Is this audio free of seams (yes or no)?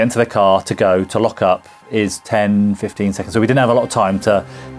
yes